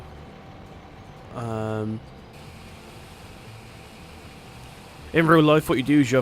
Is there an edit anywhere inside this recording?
yes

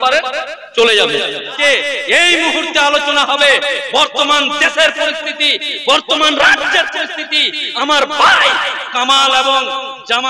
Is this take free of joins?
no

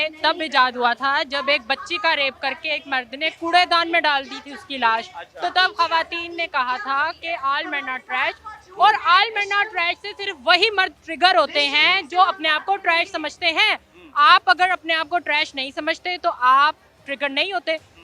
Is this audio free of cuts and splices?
yes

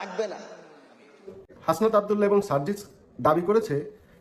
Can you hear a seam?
yes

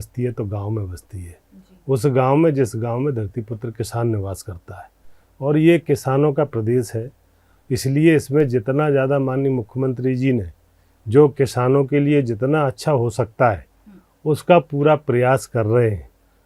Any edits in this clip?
no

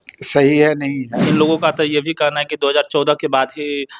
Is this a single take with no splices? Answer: no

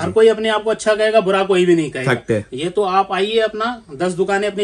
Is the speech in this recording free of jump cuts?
yes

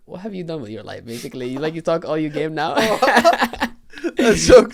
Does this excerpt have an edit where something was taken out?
no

